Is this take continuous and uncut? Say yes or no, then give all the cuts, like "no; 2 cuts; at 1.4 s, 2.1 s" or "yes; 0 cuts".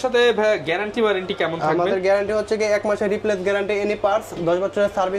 yes; 0 cuts